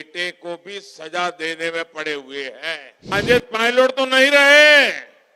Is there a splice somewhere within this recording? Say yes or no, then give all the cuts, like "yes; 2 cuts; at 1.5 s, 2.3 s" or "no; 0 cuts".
yes; 1 cut; at 3.1 s